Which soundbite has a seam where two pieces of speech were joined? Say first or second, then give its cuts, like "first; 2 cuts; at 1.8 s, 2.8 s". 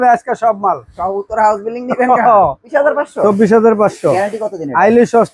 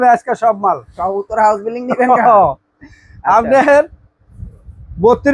first; 1 cut; at 2.7 s